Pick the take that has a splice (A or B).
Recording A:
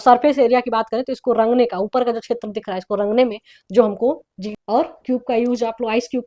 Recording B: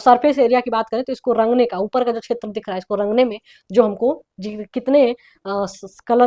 A